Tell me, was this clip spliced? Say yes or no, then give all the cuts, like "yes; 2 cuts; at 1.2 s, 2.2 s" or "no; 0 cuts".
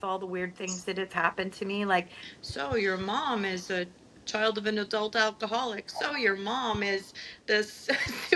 no; 0 cuts